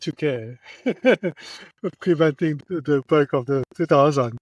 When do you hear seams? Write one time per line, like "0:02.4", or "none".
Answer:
0:02.6